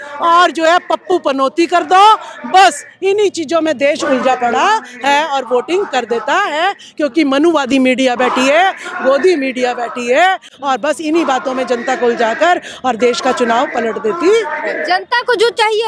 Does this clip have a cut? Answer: no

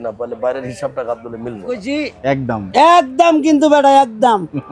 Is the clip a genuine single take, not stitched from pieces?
no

